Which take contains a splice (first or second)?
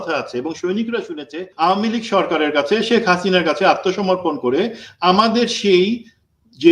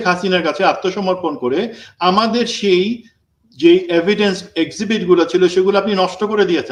first